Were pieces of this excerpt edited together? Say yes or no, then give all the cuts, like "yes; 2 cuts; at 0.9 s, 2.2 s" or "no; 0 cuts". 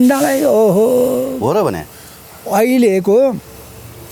no; 0 cuts